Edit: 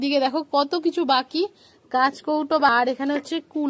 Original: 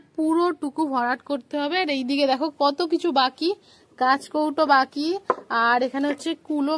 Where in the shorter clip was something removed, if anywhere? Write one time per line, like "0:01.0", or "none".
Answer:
0:02.7